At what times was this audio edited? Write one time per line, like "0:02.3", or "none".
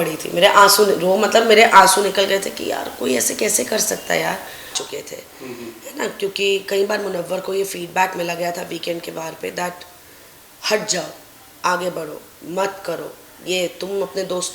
0:04.8